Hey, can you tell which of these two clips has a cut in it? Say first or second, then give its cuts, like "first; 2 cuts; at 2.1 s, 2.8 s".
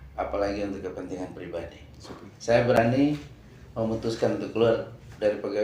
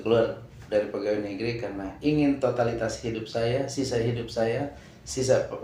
first; 1 cut; at 2.8 s